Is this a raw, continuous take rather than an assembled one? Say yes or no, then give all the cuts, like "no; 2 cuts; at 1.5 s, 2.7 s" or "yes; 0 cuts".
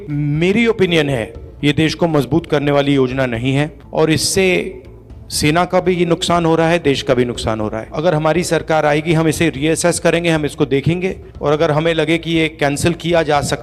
yes; 0 cuts